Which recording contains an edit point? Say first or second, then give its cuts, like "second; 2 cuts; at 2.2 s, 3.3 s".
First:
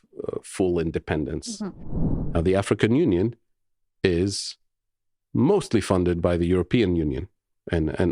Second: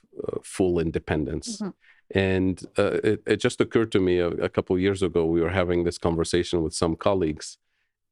first; 1 cut; at 1.9 s